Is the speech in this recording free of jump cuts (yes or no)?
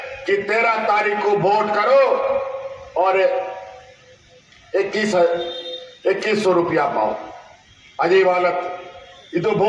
yes